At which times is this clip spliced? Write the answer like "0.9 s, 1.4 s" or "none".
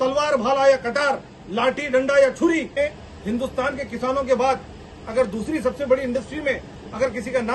2.8 s